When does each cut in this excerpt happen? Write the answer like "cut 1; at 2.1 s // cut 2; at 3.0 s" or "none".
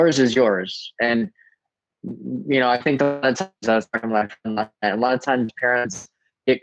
none